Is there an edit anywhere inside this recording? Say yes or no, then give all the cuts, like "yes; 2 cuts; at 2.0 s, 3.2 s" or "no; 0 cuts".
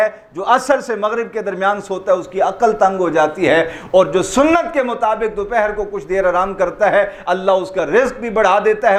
no; 0 cuts